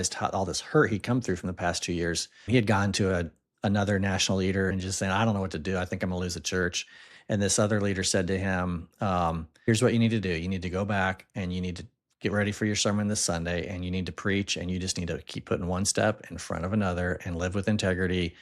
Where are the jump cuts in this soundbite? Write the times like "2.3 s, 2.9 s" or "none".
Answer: 4.7 s